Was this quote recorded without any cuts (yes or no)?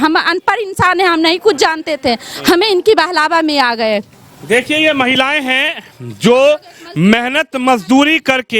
yes